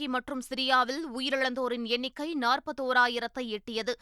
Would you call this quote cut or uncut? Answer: uncut